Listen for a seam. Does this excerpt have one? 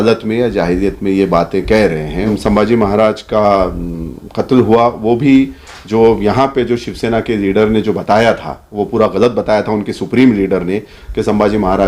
yes; 1 cut; at 2.3 s

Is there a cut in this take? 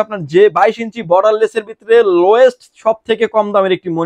no; 0 cuts

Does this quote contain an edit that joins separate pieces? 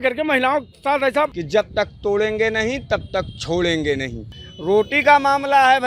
yes; 2 cuts; at 1.4 s, 4.4 s

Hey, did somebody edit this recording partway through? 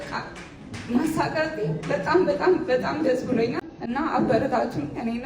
yes; 1 cut; at 3.7 s

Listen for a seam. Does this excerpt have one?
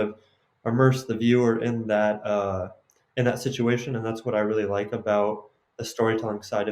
no; 0 cuts

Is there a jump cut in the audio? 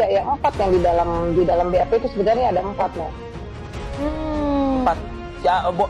no; 0 cuts

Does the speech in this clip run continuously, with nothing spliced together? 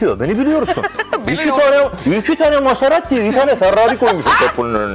yes; 0 cuts

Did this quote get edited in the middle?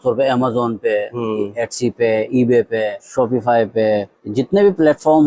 yes; 2 cuts; at 3.0 s, 4.2 s

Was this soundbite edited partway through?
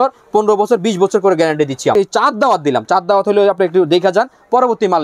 yes; 1 cut; at 1.9 s

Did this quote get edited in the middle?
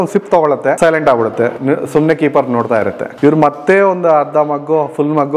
yes; 2 cuts; at 0.8 s, 3.0 s

